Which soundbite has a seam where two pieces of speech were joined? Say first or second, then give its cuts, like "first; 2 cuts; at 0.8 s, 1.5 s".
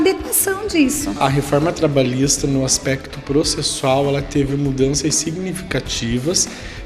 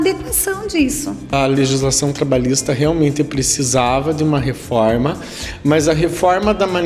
first; 1 cut; at 1.1 s